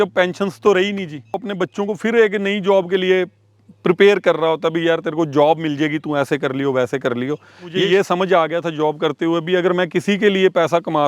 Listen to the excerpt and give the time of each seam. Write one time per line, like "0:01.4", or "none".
0:01.3
0:07.7